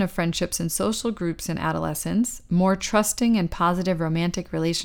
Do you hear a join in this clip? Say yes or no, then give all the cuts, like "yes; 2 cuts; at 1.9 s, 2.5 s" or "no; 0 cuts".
no; 0 cuts